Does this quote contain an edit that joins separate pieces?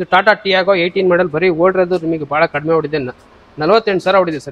no; 0 cuts

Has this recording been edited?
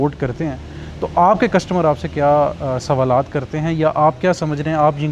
no; 0 cuts

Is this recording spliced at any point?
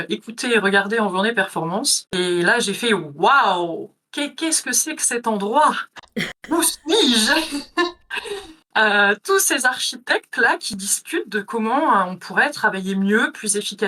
yes; 1 cut; at 2.0 s

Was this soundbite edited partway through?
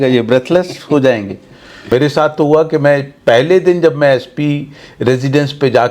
yes; 1 cut; at 1.8 s

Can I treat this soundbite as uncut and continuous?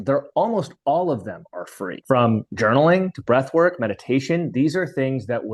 yes; 0 cuts

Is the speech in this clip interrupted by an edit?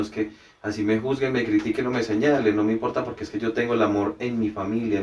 no; 0 cuts

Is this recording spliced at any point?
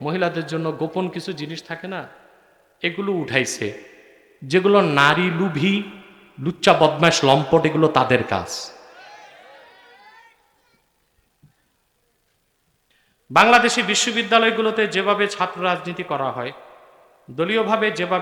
no; 0 cuts

